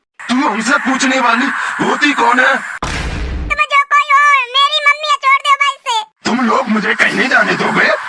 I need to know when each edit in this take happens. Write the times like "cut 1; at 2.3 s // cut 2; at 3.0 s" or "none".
cut 1; at 3.5 s

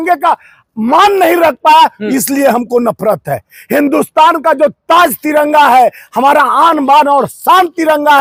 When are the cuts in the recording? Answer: none

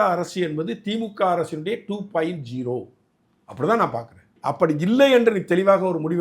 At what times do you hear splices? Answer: cut 1; at 4.3 s

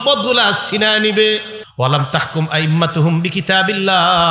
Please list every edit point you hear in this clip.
cut 1; at 1.6 s

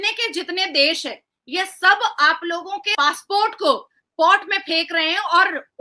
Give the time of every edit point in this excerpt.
cut 1; at 2.9 s

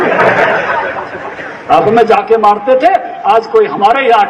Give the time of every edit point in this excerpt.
cut 1; at 1.8 s

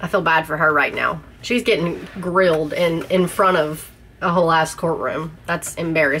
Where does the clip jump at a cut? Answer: cut 1; at 1.4 s

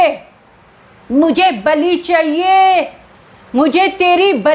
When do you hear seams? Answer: none

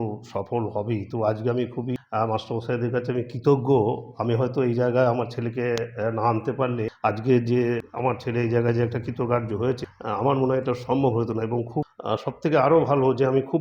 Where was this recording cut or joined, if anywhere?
cut 1; at 2.0 s // cut 2; at 6.9 s // cut 3; at 7.9 s // cut 4; at 9.9 s // cut 5; at 11.9 s

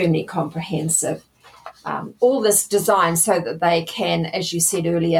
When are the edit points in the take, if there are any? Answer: none

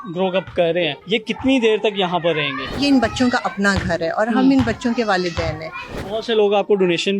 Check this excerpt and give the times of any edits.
cut 1; at 1.0 s // cut 2; at 2.8 s // cut 3; at 6.0 s

